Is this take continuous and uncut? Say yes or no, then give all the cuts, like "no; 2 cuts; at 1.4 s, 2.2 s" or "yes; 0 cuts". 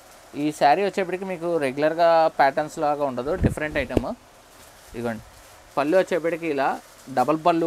yes; 0 cuts